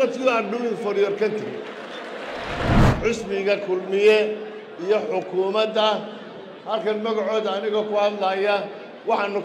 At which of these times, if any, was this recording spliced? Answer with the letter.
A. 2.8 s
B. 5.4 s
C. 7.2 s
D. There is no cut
A